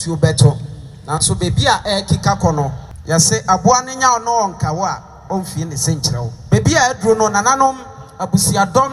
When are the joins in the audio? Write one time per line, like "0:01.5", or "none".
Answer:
0:02.9
0:06.3